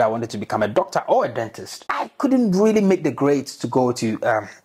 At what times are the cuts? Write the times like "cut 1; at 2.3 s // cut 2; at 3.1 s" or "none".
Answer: cut 1; at 1.8 s